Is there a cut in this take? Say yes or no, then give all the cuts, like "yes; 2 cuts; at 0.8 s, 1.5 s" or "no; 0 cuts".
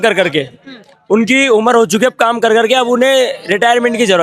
no; 0 cuts